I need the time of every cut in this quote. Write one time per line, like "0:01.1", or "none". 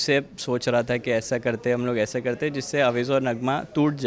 none